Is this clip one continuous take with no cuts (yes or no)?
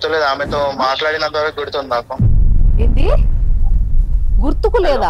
yes